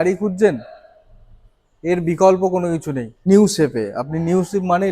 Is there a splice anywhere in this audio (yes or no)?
yes